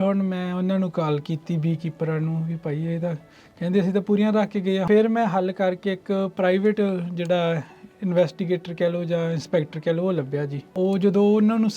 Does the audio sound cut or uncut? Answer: cut